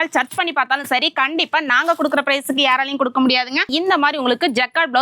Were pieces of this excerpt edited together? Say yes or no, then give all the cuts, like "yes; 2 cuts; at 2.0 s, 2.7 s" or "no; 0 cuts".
yes; 1 cut; at 3.7 s